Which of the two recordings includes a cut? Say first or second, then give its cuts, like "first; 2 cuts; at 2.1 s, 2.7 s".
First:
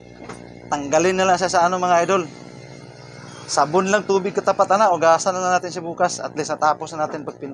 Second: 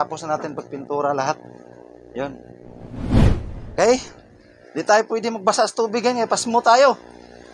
second; 2 cuts; at 2.8 s, 3.6 s